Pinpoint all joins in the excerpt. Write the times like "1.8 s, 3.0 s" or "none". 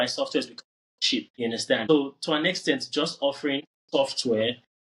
1.9 s